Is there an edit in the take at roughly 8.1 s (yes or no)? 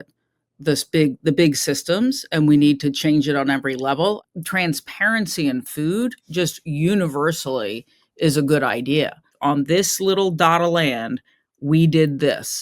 no